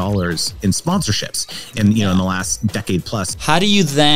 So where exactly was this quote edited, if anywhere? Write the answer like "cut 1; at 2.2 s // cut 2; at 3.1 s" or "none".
cut 1; at 0.8 s // cut 2; at 3.2 s